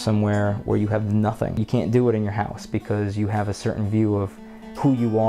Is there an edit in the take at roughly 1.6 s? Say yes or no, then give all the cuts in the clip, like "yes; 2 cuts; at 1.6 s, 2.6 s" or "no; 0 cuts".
yes; 1 cut; at 1.6 s